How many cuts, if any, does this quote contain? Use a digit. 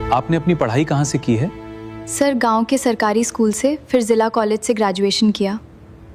0